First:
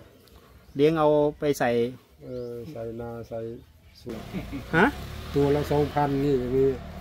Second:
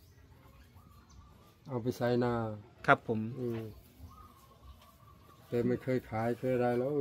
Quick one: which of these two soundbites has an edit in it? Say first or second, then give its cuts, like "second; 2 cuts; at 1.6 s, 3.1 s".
first; 1 cut; at 4.1 s